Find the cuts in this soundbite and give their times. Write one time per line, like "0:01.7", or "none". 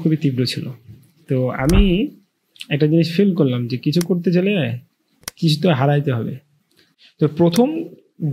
0:06.8